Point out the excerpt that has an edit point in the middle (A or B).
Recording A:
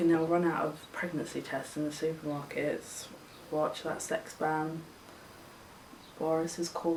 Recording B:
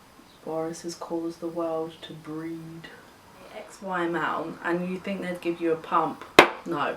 B